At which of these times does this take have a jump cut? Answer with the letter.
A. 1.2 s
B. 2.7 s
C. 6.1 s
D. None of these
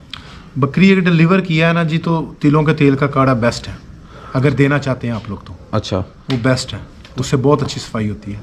D